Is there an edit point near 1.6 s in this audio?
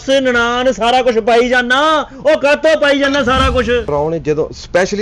no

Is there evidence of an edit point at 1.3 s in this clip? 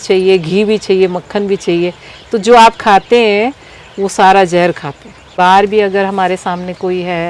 no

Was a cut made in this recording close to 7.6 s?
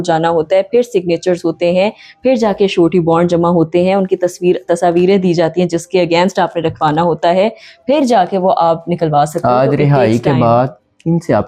no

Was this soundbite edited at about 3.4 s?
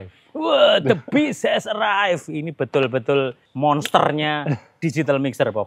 yes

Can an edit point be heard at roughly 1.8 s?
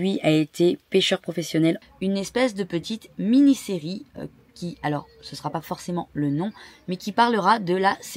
yes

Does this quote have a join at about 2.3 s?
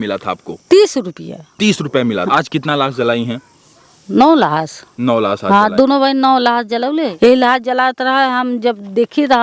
yes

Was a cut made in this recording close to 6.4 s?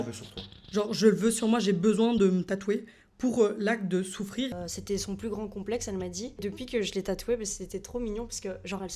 yes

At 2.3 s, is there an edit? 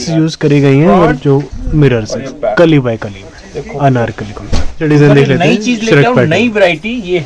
no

